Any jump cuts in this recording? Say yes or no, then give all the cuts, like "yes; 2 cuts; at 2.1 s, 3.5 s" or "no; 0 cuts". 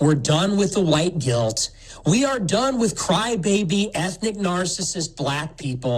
no; 0 cuts